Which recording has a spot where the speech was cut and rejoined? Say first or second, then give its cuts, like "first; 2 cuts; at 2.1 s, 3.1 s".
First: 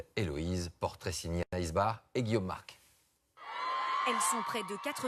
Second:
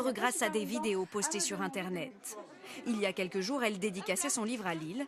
second; 1 cut; at 1.0 s